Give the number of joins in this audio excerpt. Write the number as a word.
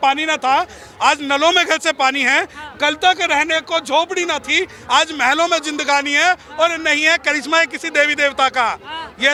zero